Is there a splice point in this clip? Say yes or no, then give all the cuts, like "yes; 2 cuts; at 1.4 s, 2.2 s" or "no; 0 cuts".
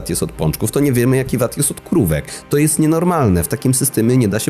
no; 0 cuts